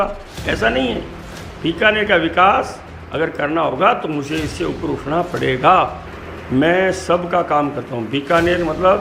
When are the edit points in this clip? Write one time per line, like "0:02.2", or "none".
0:06.0